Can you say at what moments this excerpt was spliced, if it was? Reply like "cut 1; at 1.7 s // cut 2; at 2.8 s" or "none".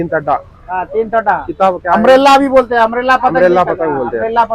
none